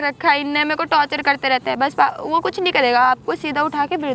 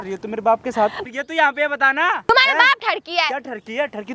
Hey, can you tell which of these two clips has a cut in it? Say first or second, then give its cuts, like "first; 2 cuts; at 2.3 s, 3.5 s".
second; 2 cuts; at 1.0 s, 2.3 s